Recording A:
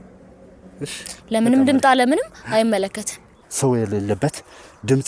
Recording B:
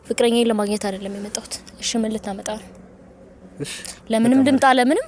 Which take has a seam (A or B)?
A